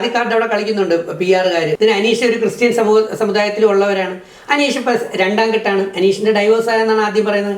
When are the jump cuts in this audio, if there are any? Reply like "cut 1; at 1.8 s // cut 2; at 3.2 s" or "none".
cut 1; at 1.7 s